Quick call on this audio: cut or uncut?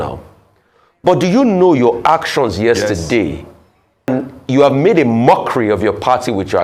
cut